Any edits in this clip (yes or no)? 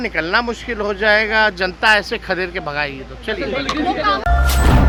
no